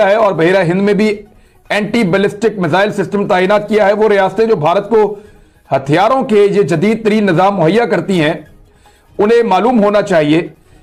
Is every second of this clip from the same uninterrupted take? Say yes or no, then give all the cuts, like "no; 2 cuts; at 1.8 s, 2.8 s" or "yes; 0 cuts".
yes; 0 cuts